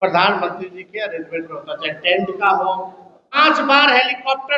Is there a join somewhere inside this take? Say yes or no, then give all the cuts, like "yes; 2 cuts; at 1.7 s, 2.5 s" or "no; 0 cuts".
yes; 1 cut; at 3.4 s